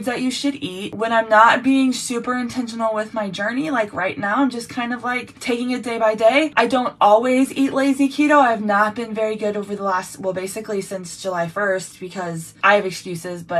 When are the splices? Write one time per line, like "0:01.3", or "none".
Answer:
0:00.9
0:05.3
0:06.5
0:12.5